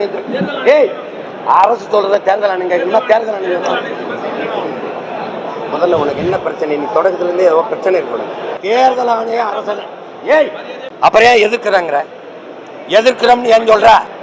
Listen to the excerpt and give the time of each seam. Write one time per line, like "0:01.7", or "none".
0:08.6
0:10.9